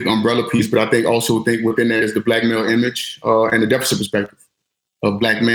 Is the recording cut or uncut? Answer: uncut